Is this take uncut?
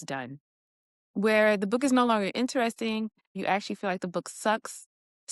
no; 1 cut; at 3.4 s

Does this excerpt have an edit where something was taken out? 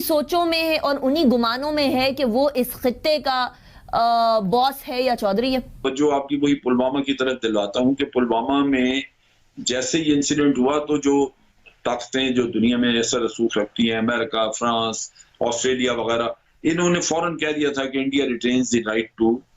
yes; 1 cut; at 5.8 s

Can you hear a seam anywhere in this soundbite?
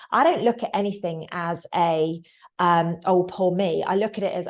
no; 0 cuts

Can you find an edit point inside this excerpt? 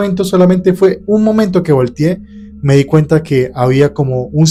no; 0 cuts

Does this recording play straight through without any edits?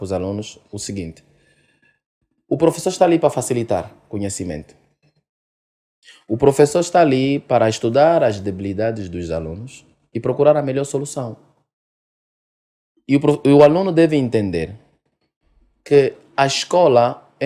yes; 0 cuts

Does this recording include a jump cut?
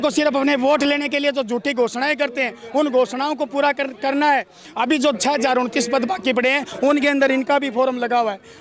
no; 0 cuts

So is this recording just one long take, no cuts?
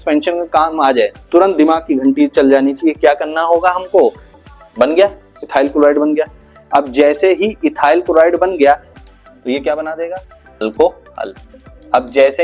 no; 2 cuts; at 4.3 s, 8.9 s

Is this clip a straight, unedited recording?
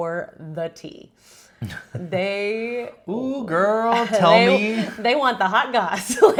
yes; 0 cuts

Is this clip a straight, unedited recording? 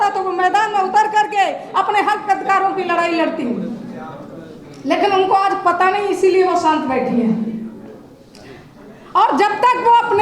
yes; 0 cuts

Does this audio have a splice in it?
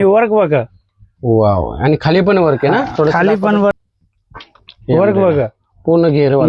yes; 1 cut; at 3.7 s

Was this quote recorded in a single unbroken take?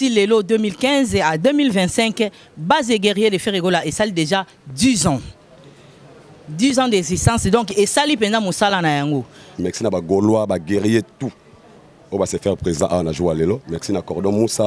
no; 1 cut; at 9.5 s

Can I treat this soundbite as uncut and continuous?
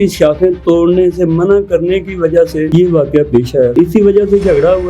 no; 2 cuts; at 2.7 s, 3.7 s

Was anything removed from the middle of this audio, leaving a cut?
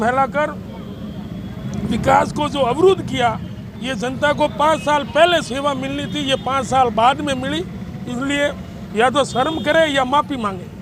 no; 0 cuts

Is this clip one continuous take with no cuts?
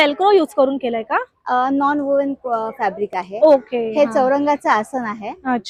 yes; 0 cuts

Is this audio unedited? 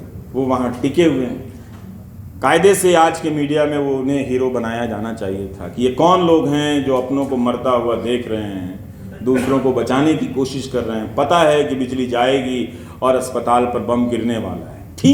yes; 0 cuts

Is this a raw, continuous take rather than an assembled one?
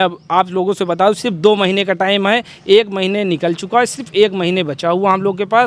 yes; 0 cuts

